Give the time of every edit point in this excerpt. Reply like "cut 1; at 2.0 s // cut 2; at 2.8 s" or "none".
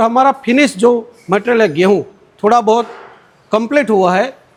none